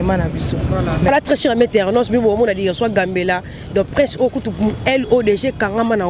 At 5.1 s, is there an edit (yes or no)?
no